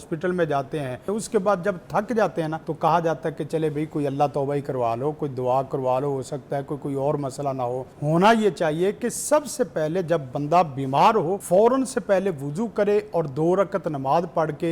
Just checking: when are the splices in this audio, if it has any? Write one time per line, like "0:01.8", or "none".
0:01.0
0:02.6
0:07.9
0:11.4